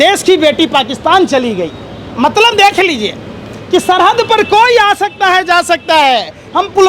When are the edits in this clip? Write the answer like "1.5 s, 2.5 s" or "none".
none